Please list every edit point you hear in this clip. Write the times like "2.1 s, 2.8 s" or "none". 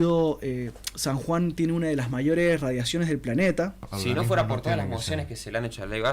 3.8 s

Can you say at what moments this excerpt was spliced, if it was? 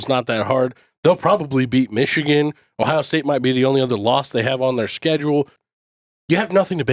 5.6 s

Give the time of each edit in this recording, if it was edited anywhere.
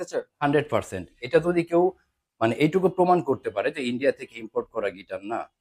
1.2 s

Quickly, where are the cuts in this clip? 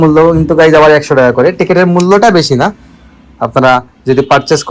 none

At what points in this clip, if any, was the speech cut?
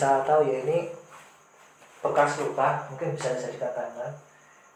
none

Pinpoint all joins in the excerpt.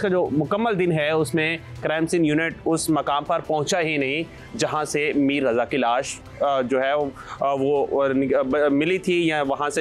none

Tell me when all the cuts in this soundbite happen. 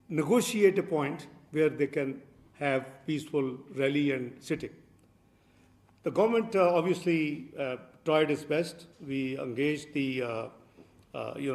none

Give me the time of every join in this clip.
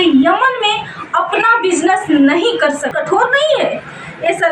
2.9 s

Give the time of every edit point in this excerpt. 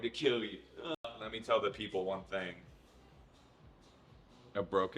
1.3 s

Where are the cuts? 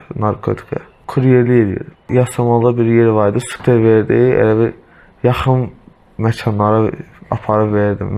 1.0 s, 2.1 s, 3.5 s

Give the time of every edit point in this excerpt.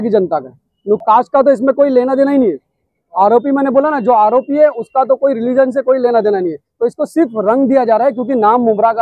1.0 s

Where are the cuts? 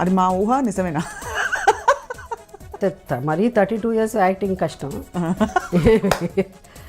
2.8 s

